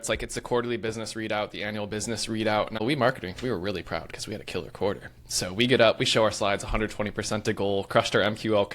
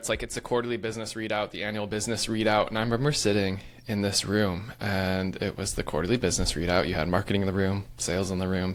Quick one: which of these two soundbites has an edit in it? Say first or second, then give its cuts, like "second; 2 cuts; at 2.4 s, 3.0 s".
first; 1 cut; at 2.8 s